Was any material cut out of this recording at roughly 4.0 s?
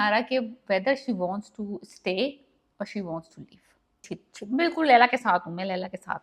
yes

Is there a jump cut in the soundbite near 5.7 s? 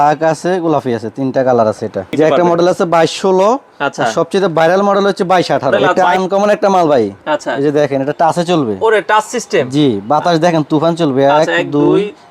yes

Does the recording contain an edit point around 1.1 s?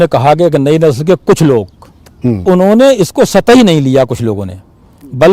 no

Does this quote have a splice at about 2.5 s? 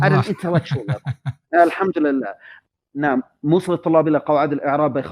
yes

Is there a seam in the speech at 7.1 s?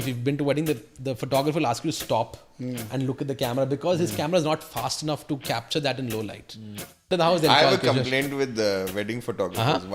yes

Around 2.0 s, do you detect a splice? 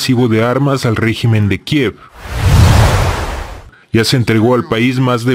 no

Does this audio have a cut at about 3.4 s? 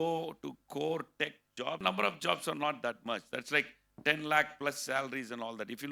no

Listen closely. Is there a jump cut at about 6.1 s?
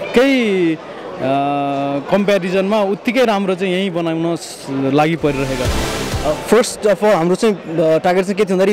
yes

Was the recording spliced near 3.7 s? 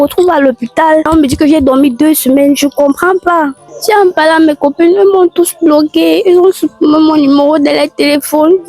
yes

